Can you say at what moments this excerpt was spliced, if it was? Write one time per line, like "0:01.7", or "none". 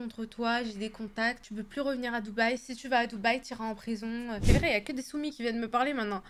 0:04.4

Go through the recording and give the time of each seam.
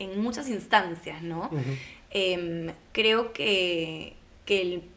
none

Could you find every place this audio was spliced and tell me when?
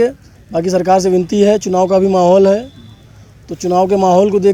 none

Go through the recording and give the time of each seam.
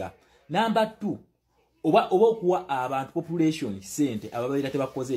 none

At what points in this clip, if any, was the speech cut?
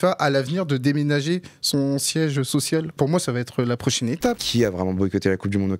0:03.0
0:04.4

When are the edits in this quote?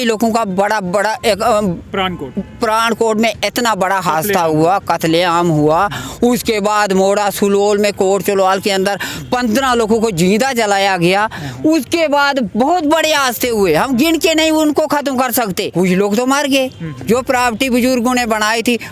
0:15.6

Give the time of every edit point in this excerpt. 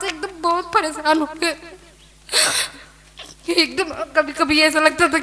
none

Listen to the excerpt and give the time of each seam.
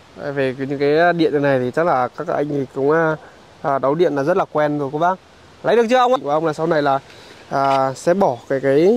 0:06.2

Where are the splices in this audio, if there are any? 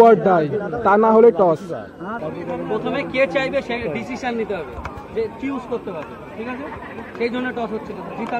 0:02.2

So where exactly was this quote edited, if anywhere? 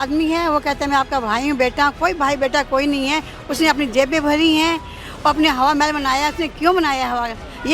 none

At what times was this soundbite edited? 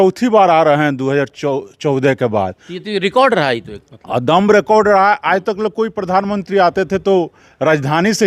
none

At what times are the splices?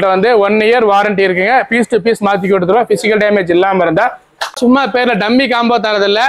0:04.5

